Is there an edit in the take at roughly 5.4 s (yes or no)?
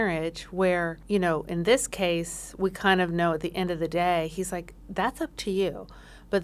no